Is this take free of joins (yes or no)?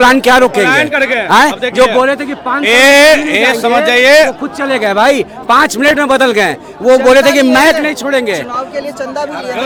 yes